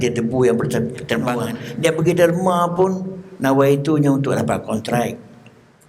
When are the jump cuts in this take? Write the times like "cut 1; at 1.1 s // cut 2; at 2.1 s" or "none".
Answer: cut 1; at 1.4 s